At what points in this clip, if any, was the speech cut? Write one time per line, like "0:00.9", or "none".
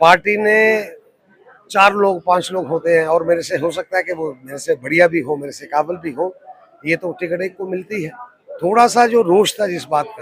none